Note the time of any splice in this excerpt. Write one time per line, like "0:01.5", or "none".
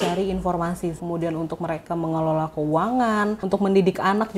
0:01.0
0:03.4

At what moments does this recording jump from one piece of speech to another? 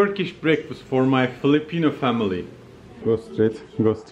0:03.0

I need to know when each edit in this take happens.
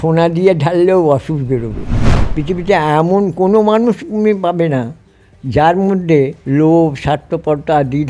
0:02.2
0:06.4

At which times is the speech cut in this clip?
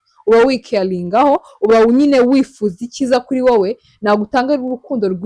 none

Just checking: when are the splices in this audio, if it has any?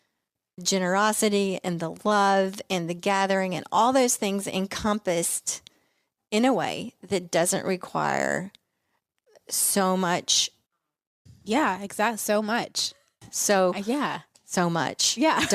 none

